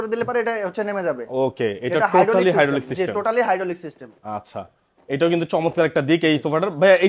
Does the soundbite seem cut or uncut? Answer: uncut